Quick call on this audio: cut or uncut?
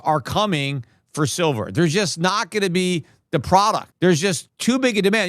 cut